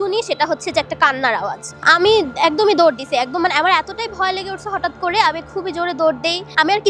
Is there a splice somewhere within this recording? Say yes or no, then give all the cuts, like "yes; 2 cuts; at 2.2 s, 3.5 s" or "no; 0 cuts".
no; 0 cuts